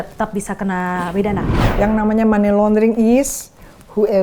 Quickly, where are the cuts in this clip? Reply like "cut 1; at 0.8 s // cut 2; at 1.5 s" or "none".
cut 1; at 1.6 s